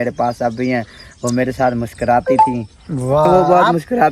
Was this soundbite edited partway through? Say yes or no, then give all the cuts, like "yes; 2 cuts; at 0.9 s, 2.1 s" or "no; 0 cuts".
no; 0 cuts